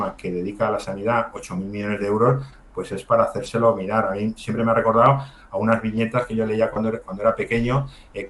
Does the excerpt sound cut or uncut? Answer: uncut